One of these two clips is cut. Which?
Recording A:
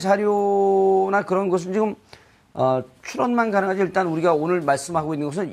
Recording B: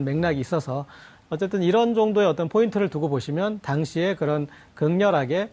B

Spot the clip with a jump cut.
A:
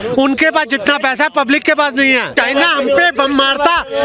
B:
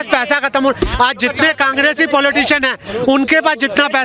A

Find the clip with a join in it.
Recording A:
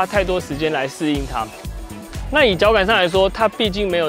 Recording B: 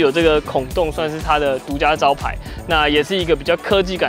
A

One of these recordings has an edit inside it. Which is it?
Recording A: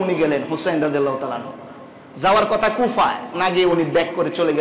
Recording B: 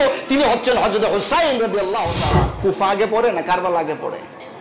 B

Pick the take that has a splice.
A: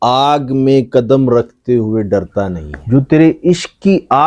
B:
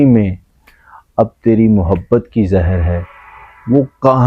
A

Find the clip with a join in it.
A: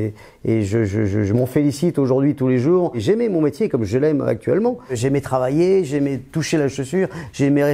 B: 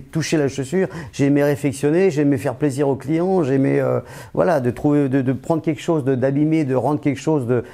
A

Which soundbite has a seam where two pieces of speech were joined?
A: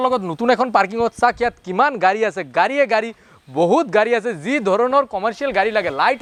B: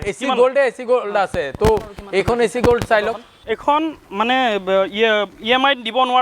B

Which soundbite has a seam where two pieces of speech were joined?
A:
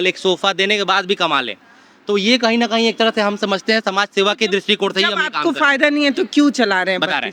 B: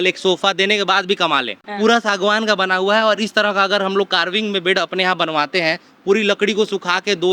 B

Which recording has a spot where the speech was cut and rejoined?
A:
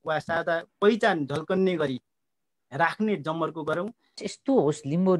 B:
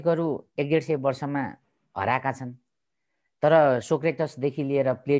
A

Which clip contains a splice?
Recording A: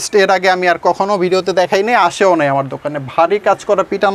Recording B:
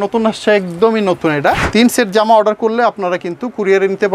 B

